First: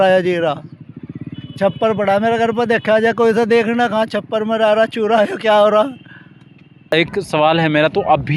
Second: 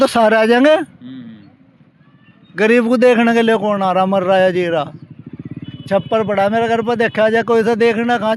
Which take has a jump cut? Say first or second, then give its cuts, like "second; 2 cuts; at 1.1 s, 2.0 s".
first; 1 cut; at 6.9 s